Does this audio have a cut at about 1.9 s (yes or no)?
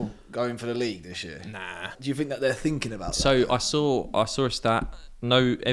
yes